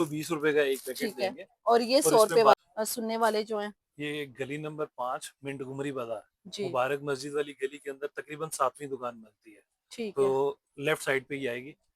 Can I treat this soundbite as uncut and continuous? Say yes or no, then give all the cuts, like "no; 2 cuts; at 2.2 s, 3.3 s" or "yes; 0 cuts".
no; 1 cut; at 2.5 s